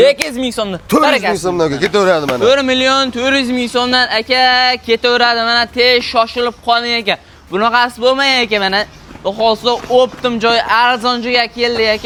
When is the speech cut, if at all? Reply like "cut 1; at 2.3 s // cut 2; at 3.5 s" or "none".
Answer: none